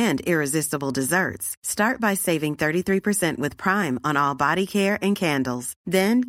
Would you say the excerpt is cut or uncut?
uncut